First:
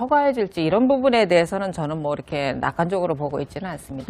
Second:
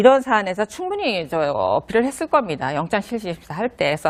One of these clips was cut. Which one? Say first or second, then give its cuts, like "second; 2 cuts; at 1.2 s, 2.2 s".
first; 1 cut; at 1.5 s